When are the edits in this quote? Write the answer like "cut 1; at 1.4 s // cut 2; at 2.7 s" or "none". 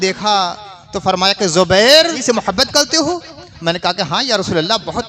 cut 1; at 2.2 s